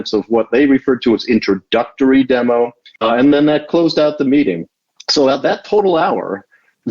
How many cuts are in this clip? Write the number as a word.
one